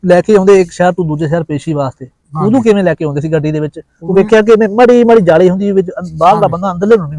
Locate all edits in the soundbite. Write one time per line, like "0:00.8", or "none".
none